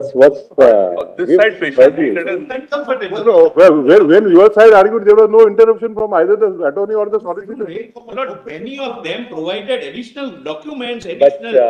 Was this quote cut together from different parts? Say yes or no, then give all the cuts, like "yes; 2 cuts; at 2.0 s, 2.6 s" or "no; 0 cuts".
no; 0 cuts